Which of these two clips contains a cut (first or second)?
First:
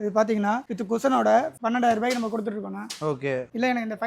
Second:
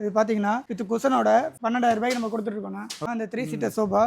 second